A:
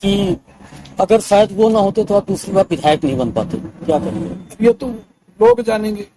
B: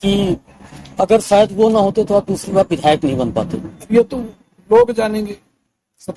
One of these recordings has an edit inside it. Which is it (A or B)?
B